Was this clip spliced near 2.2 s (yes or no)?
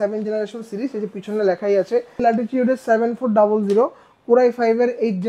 yes